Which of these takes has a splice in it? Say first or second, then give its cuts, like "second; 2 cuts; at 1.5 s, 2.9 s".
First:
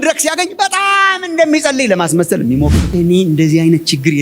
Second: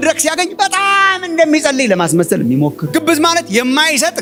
first; 1 cut; at 2.9 s